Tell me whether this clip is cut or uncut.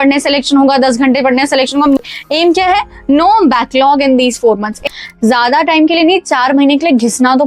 cut